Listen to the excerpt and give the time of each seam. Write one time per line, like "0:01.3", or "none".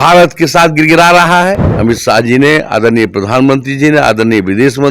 0:01.7